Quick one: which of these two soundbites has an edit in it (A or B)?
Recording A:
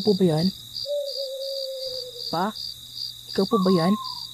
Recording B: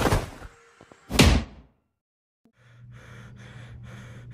B